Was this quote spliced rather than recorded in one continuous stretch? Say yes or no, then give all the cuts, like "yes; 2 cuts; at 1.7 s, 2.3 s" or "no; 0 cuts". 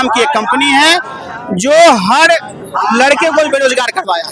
no; 0 cuts